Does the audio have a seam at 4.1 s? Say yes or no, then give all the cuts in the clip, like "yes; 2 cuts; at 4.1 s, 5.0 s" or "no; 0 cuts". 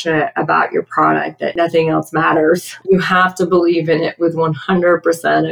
no; 2 cuts; at 1.5 s, 2.7 s